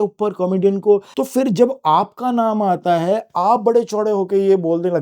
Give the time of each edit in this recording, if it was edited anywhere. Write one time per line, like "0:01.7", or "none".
0:01.2

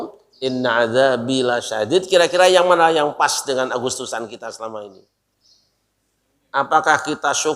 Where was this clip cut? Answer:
0:04.9

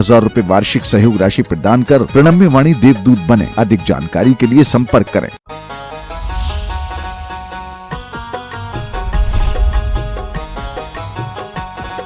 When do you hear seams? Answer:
0:05.4
0:10.1

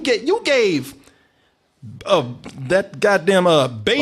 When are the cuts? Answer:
none

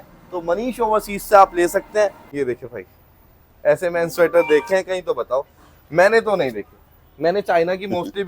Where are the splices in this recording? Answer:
0:02.3

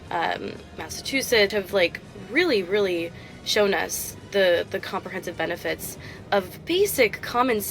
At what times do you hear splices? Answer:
0:01.5

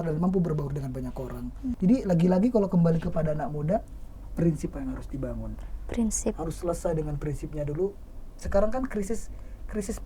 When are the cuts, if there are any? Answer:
0:01.8

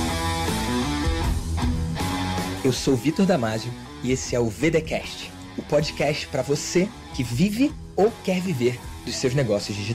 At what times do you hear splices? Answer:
none

